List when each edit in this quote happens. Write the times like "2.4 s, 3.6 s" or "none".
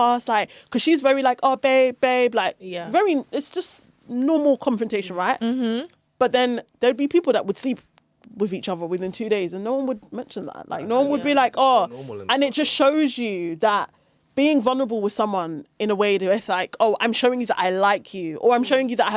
none